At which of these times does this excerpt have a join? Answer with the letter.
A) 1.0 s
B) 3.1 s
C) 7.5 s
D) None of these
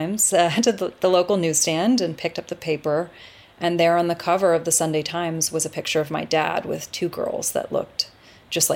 D